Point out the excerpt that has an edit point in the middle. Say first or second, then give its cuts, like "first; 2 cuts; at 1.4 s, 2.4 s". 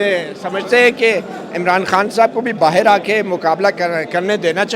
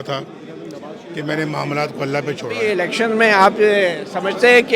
second; 1 cut; at 2.6 s